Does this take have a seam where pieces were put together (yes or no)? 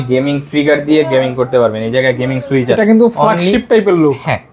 yes